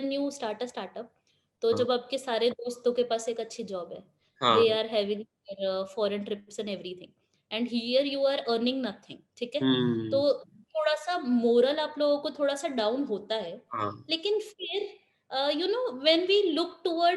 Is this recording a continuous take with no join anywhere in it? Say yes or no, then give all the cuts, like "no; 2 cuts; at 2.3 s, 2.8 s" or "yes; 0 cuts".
yes; 0 cuts